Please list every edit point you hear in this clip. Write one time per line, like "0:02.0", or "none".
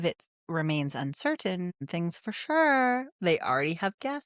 0:01.8